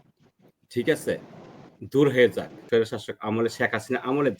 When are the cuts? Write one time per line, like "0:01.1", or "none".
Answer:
0:02.5